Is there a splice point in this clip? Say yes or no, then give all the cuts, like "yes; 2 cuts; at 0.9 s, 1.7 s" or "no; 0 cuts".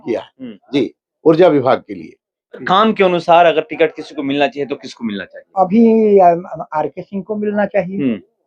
yes; 1 cut; at 2.6 s